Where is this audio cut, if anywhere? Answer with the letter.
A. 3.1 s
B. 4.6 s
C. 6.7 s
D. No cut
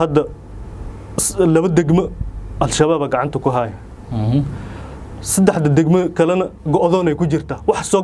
D